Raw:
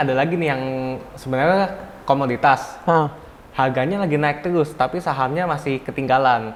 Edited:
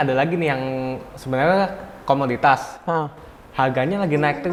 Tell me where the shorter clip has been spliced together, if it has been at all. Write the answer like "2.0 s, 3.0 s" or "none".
none